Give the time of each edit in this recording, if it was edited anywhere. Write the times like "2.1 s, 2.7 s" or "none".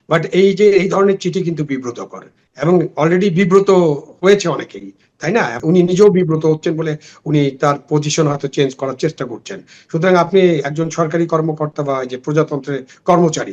5.6 s